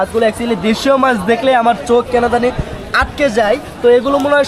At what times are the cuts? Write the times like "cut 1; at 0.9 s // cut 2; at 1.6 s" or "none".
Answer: none